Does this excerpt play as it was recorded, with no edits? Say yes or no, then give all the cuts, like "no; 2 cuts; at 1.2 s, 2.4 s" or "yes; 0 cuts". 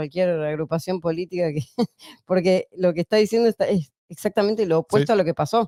yes; 0 cuts